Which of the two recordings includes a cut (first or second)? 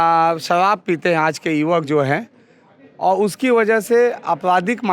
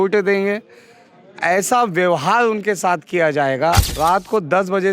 second